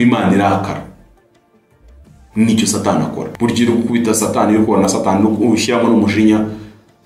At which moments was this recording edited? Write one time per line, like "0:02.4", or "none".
0:03.3

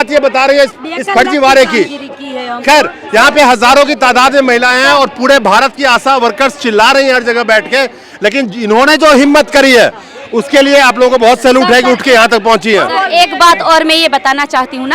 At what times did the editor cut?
none

